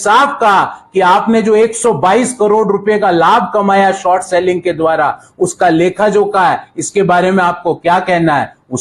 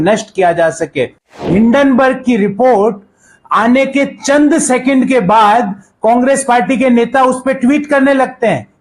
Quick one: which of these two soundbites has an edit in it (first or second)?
second